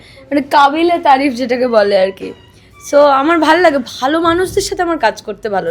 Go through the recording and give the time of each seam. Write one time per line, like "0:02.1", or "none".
none